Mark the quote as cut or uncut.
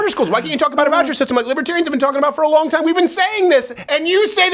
uncut